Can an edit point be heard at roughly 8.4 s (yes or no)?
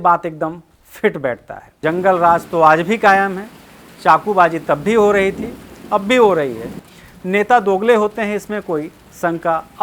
no